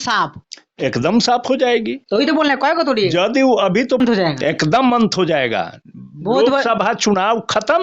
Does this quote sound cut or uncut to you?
cut